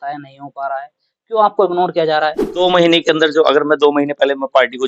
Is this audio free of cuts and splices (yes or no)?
no